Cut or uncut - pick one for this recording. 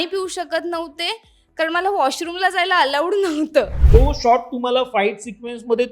cut